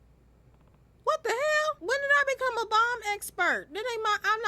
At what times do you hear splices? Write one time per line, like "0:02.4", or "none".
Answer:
0:01.8

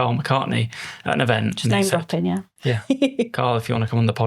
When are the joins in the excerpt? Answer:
0:02.5

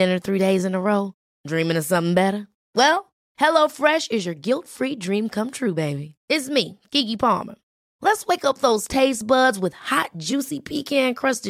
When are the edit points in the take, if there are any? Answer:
none

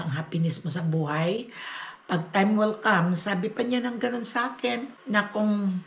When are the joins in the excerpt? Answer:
0:04.9

